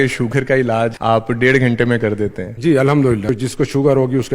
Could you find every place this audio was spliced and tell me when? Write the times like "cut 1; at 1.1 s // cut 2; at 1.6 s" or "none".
cut 1; at 1.0 s // cut 2; at 2.5 s // cut 3; at 3.3 s